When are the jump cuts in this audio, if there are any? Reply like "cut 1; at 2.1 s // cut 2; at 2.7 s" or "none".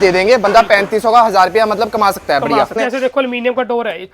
cut 1; at 2.8 s